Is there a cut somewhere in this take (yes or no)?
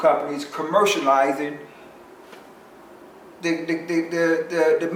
no